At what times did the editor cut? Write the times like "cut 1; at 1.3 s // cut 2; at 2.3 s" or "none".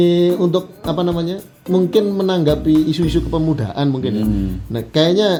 none

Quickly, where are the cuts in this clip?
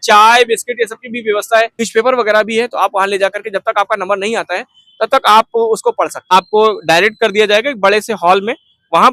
cut 1; at 1.9 s // cut 2; at 6.3 s

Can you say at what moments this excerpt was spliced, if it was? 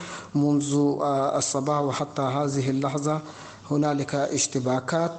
none

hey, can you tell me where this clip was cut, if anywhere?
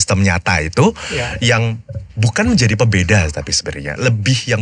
none

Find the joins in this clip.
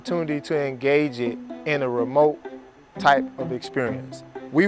none

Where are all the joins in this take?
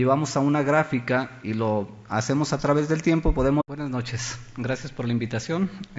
none

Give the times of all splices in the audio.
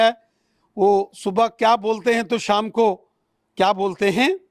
none

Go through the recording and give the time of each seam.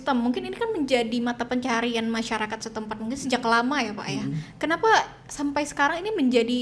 none

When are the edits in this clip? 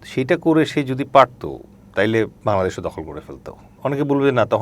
cut 1; at 2.3 s // cut 2; at 3.7 s

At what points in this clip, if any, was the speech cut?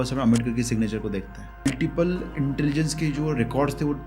cut 1; at 1.7 s

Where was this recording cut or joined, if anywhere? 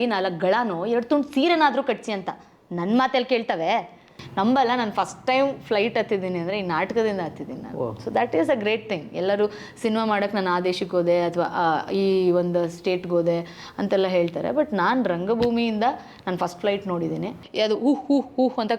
cut 1; at 4.2 s // cut 2; at 17.4 s

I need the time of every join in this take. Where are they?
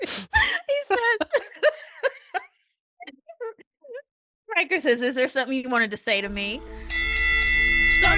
cut 1; at 7.1 s

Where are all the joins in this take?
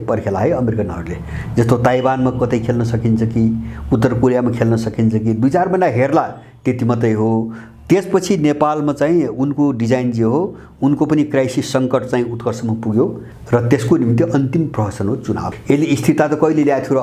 cut 1; at 13.3 s // cut 2; at 15.5 s

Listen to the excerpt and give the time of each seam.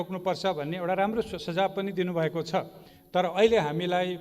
cut 1; at 2.9 s

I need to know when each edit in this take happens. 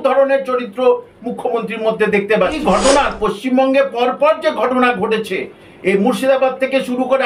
cut 1; at 2.6 s

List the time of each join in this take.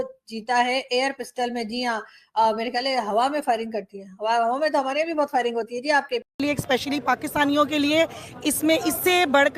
cut 1; at 6.3 s

